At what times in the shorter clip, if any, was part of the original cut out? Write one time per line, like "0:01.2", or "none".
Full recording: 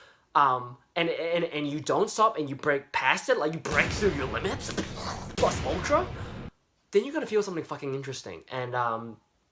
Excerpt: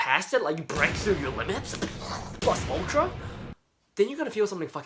none